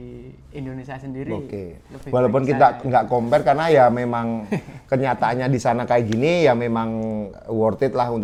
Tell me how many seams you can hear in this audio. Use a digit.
0